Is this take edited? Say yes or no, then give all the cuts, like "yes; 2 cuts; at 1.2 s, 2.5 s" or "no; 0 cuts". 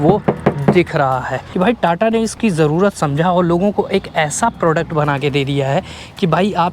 yes; 1 cut; at 1.4 s